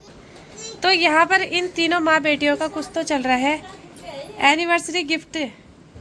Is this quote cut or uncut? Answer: uncut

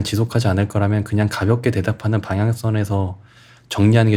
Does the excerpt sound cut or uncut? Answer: uncut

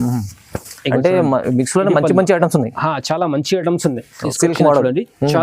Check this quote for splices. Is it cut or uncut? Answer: cut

